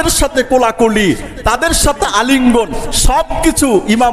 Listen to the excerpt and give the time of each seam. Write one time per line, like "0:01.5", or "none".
none